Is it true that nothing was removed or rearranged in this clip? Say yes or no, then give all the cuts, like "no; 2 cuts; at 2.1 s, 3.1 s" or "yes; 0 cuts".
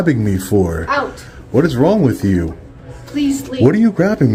yes; 0 cuts